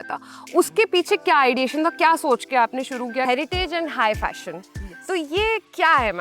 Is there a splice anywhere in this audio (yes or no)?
yes